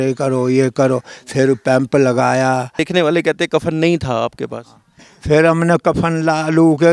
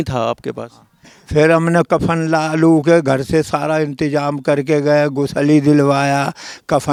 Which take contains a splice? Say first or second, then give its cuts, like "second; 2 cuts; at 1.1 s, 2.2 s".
first; 1 cut; at 2.8 s